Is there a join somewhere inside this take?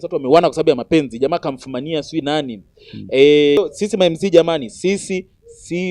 yes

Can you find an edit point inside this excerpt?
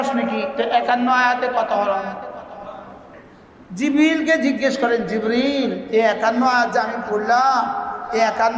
yes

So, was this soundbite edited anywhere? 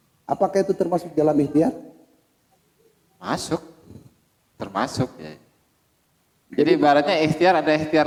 no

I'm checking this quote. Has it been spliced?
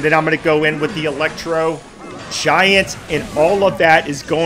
no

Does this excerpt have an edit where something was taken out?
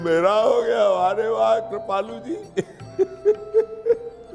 no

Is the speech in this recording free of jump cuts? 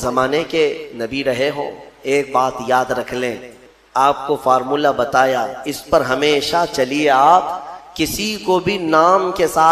no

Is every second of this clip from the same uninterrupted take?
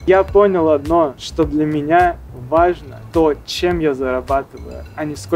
no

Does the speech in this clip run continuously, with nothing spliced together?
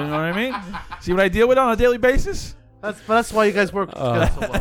yes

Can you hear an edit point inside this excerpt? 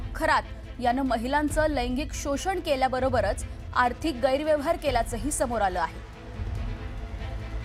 no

